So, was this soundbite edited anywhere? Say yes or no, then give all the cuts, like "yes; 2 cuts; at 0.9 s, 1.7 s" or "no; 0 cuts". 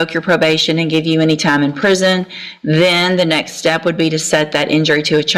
no; 0 cuts